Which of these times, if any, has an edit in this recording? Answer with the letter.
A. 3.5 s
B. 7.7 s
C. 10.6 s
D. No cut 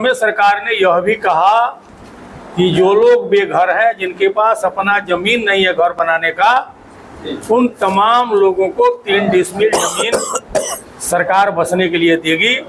D